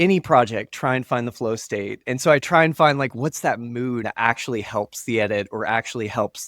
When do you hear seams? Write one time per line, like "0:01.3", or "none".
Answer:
0:04.0